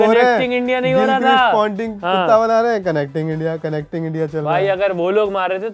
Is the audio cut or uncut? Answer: uncut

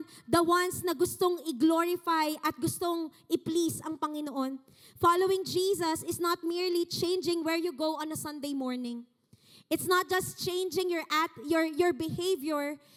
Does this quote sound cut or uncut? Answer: uncut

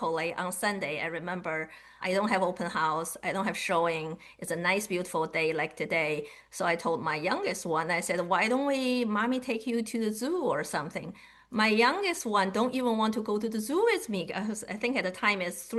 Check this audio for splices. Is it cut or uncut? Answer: uncut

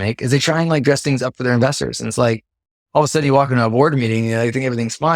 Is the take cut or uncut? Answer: uncut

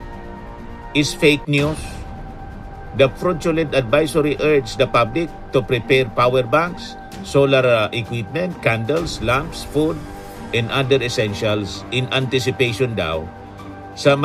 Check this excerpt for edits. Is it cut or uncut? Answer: uncut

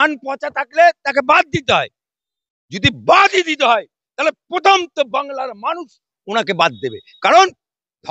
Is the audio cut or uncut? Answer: uncut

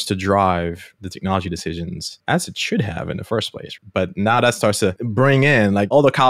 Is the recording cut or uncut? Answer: cut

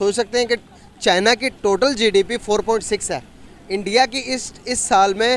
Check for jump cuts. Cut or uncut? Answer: uncut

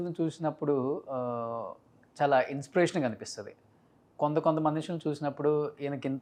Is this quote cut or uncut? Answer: uncut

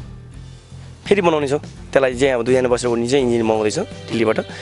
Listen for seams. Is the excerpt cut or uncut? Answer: uncut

